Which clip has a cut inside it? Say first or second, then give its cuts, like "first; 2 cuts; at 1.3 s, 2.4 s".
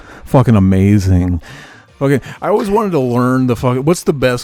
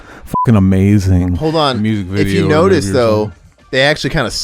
second; 1 cut; at 1.4 s